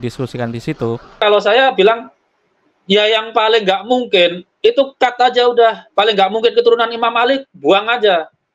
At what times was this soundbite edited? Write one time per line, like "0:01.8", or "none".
0:01.2